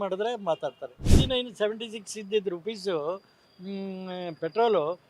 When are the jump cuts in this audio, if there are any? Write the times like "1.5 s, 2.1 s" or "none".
1.0 s